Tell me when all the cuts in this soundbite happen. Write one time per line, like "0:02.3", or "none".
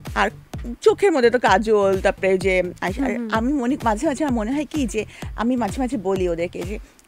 none